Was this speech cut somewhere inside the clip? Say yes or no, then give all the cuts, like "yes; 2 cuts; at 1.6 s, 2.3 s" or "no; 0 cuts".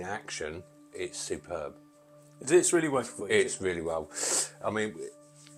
no; 0 cuts